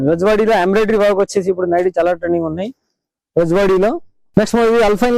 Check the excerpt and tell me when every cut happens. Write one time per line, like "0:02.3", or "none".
0:04.1